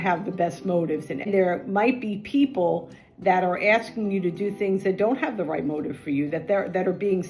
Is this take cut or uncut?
cut